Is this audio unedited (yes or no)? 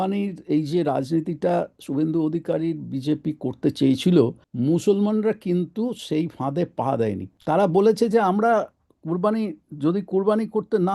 no